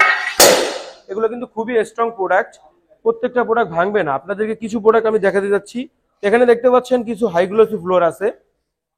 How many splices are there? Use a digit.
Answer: 0